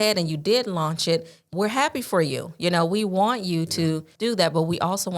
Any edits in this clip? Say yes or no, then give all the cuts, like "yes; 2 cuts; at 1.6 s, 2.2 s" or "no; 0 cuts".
yes; 2 cuts; at 1.5 s, 4.1 s